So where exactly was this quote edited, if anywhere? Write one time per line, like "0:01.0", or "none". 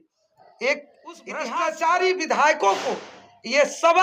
0:01.5